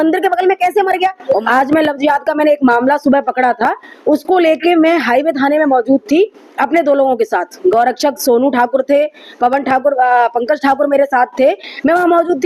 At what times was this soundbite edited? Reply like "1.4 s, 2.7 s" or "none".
1.4 s